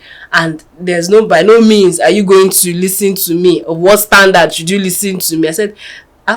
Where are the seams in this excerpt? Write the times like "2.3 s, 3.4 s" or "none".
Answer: none